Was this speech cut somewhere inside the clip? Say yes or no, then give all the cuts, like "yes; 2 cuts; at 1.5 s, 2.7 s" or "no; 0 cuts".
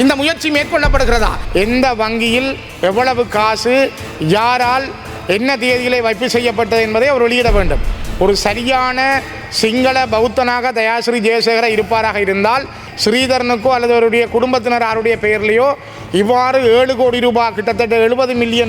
yes; 2 cuts; at 1.4 s, 12.8 s